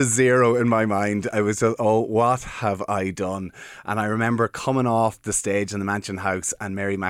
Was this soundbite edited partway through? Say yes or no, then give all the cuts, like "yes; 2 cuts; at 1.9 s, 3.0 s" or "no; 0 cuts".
no; 0 cuts